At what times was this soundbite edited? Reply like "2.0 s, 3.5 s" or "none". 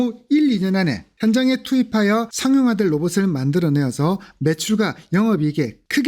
none